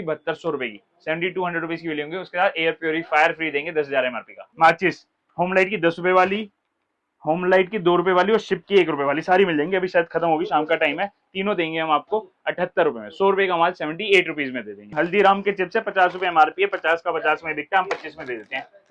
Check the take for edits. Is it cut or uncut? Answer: cut